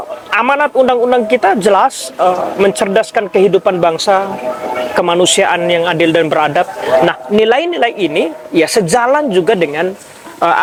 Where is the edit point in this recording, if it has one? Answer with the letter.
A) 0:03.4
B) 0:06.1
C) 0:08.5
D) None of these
D